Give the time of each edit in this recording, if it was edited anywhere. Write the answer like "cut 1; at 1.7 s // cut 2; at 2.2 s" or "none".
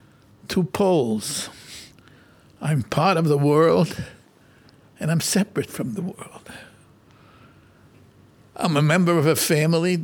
none